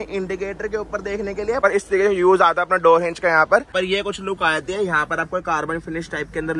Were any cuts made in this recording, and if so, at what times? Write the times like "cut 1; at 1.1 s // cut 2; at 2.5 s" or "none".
cut 1; at 1.6 s // cut 2; at 3.7 s